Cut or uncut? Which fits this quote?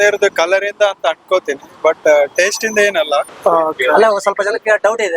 cut